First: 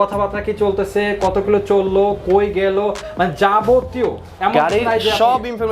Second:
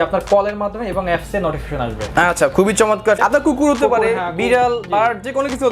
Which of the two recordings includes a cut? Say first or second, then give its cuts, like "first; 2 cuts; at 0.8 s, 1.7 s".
second; 1 cut; at 3.2 s